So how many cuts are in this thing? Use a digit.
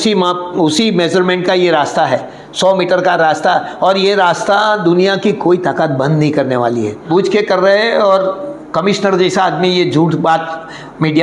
1